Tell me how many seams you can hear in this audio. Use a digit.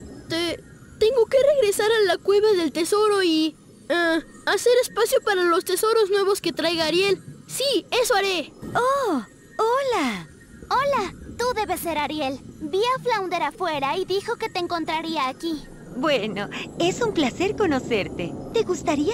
1